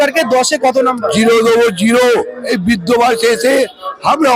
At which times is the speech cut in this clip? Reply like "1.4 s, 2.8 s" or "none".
2.4 s